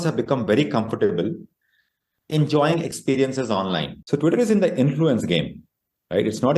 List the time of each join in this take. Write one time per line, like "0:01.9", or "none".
0:03.9